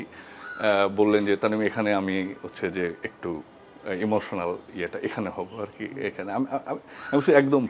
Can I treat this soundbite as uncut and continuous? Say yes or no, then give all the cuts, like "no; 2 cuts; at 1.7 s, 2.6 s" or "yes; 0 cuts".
yes; 0 cuts